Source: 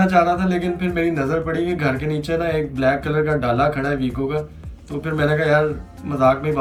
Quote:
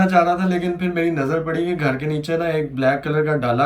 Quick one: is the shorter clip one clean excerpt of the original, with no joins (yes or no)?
yes